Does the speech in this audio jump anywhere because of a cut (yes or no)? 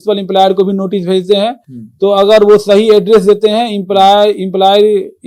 no